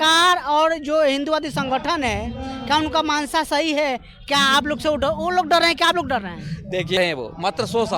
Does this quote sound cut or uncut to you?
cut